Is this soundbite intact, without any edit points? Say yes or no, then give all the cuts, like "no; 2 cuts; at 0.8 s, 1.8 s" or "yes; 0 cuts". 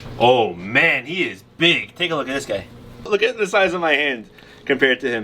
no; 1 cut; at 3.1 s